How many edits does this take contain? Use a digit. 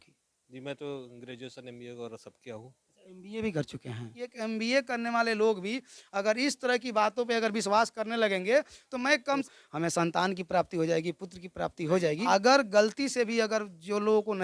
3